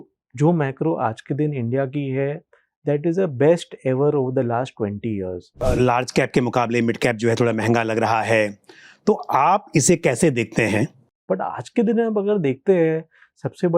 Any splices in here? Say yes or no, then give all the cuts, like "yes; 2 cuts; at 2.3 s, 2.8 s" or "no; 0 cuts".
yes; 2 cuts; at 5.6 s, 11.1 s